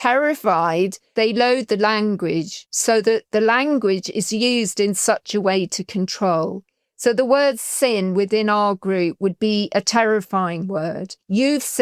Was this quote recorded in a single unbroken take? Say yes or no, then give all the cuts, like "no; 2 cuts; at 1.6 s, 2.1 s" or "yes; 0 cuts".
no; 1 cut; at 1.1 s